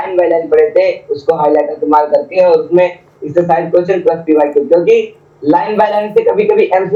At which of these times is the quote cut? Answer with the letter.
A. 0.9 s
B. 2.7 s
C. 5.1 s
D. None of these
D